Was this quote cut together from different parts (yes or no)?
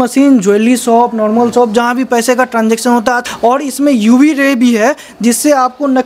yes